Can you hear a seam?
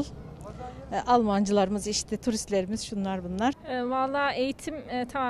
yes; 1 cut; at 3.6 s

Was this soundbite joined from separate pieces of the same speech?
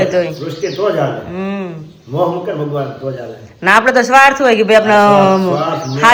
no; 0 cuts

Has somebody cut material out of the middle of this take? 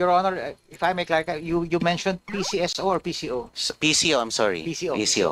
yes; 1 cut; at 2.5 s

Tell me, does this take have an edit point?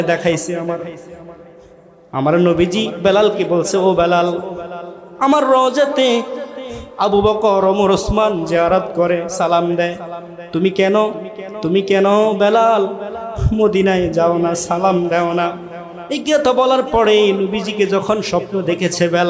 no; 0 cuts

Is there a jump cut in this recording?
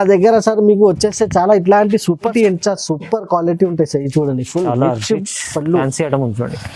yes; 1 cut; at 2.3 s

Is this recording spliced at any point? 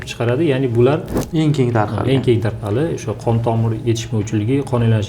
yes; 1 cut; at 1.2 s

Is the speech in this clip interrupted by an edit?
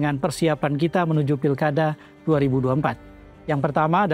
no; 0 cuts

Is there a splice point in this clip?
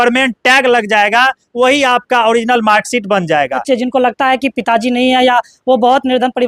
yes; 1 cut; at 3.6 s

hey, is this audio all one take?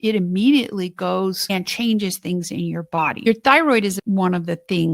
no; 2 cuts; at 1.4 s, 3.3 s

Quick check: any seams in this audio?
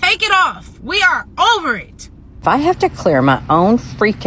yes; 1 cut; at 2.4 s

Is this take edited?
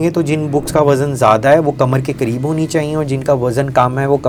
no; 0 cuts

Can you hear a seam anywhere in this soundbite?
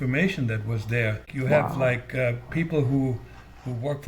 yes; 1 cut; at 1.3 s

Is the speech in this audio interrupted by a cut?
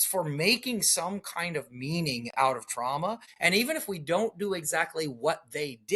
yes; 1 cut; at 3.3 s

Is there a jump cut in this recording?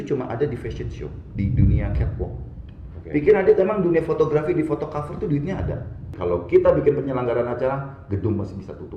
yes; 1 cut; at 6.1 s

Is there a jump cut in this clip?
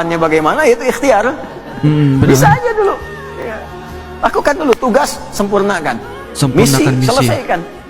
no; 0 cuts

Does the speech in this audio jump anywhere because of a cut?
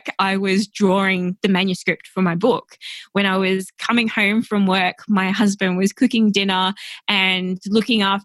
no; 0 cuts

